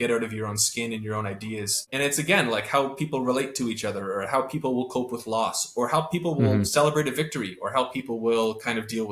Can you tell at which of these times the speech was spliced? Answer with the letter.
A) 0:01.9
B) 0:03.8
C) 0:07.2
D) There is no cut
A